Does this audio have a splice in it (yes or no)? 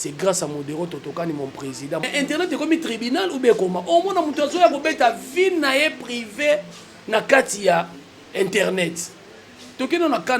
yes